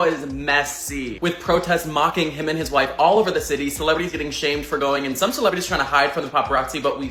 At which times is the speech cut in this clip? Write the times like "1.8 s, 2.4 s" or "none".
none